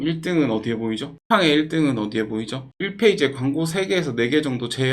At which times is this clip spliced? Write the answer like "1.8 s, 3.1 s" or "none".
1.1 s, 2.7 s